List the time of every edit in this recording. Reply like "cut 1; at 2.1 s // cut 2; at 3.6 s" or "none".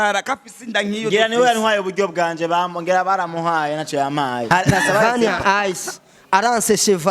cut 1; at 4.5 s